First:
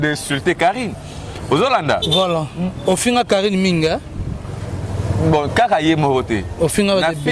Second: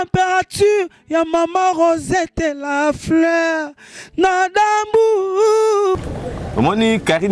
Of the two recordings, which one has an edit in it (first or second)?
second